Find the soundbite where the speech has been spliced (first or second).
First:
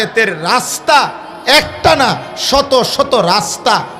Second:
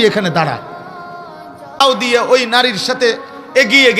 second